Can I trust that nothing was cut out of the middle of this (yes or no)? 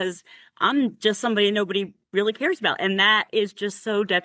yes